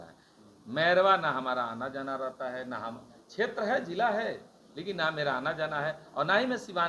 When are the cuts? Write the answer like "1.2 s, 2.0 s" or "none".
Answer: none